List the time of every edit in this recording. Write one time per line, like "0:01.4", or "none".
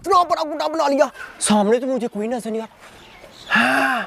0:01.2